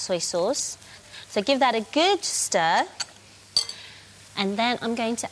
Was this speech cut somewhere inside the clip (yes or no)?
yes